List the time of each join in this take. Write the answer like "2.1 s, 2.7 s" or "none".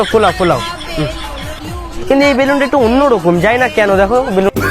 1.6 s